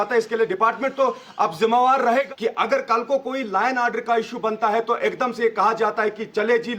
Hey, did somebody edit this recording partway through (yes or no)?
yes